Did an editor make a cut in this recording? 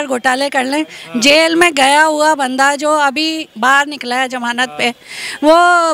no; 0 cuts

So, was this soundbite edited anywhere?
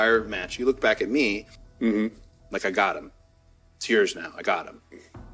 no; 0 cuts

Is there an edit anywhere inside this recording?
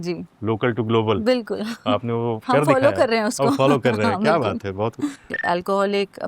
yes; 1 cut; at 5.3 s

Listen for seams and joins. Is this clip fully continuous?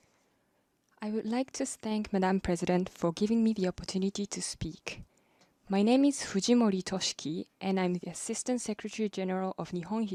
yes; 0 cuts

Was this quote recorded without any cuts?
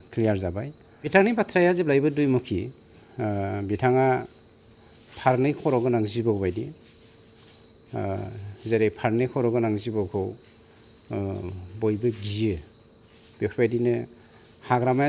no; 1 cut; at 1.1 s

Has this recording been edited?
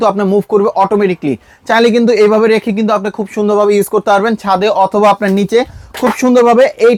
no; 0 cuts

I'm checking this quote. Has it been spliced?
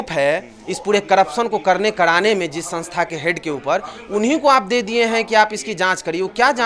no; 0 cuts

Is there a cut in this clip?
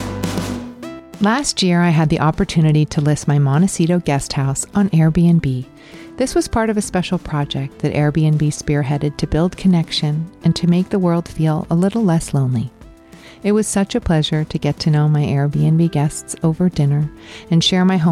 yes; 1 cut; at 1.0 s

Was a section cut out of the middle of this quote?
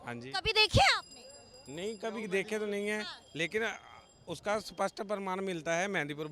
no; 0 cuts

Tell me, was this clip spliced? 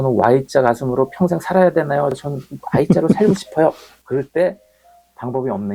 no; 0 cuts

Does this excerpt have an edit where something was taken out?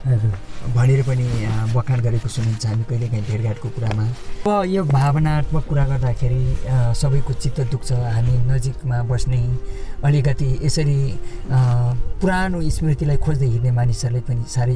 yes; 1 cut; at 4.4 s

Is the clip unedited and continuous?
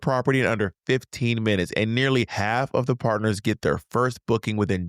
no; 1 cut; at 2.3 s

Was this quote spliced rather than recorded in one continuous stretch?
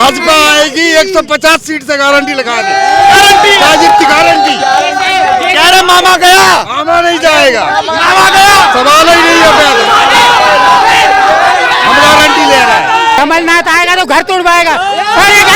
yes; 1 cut; at 13.2 s

